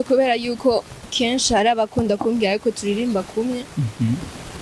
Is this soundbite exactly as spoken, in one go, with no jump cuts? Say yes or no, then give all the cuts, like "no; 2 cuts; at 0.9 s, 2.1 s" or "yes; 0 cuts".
yes; 0 cuts